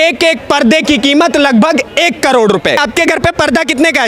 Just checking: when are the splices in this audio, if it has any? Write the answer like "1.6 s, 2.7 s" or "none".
2.8 s